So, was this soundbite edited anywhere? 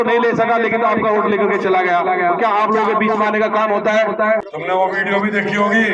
yes; 1 cut; at 4.5 s

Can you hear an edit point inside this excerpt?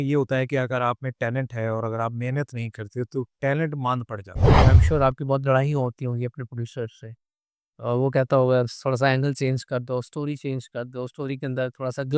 yes; 1 cut; at 4.6 s

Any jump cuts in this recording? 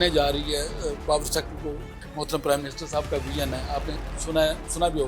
yes; 1 cut; at 1.9 s

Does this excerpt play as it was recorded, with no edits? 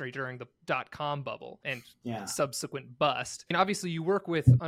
no; 2 cuts; at 1.6 s, 3.5 s

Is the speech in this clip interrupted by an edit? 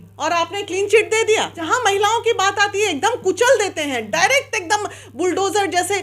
yes; 1 cut; at 1.6 s

